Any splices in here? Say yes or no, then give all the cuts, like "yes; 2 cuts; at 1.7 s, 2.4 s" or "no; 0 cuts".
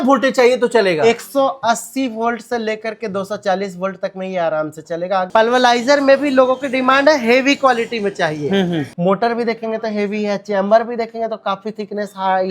yes; 2 cuts; at 5.3 s, 8.9 s